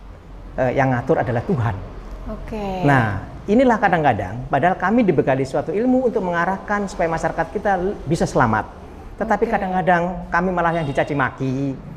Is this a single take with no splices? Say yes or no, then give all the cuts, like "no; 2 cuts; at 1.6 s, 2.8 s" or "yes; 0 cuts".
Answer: yes; 0 cuts